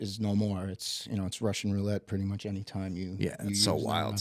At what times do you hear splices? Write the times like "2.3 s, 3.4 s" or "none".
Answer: none